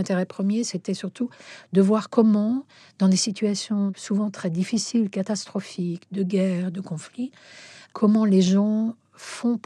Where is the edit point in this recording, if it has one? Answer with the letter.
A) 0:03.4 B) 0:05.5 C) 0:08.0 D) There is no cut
D